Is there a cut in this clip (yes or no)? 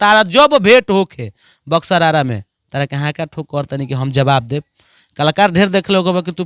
no